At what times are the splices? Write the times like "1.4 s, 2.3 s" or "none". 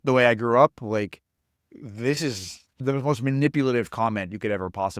2.8 s